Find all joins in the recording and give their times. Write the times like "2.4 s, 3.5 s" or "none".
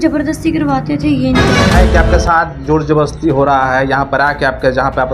1.7 s

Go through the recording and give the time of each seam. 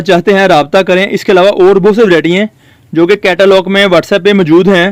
none

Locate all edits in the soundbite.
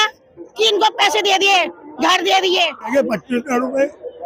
2.9 s

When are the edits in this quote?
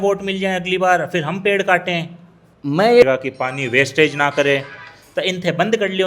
3.0 s

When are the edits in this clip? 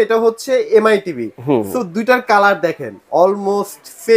none

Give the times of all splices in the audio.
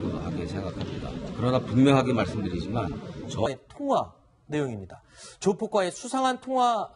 none

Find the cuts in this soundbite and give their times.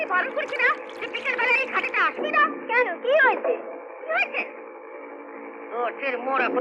none

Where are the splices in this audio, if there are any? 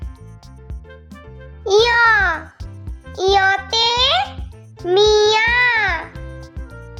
none

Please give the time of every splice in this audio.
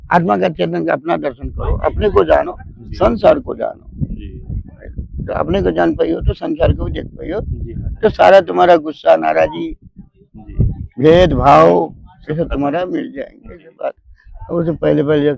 none

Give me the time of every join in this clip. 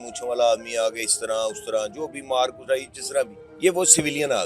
3.4 s

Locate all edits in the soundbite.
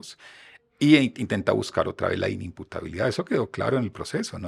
none

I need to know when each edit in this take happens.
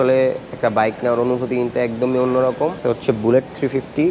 2.8 s

